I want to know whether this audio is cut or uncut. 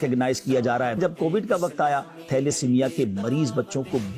cut